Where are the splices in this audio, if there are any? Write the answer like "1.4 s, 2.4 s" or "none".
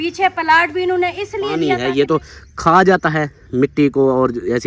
1.5 s